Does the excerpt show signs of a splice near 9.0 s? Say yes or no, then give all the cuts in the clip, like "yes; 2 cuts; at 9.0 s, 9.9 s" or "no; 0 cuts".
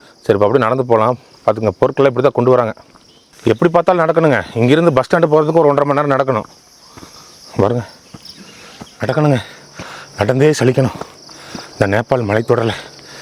yes; 2 cuts; at 3.4 s, 9.0 s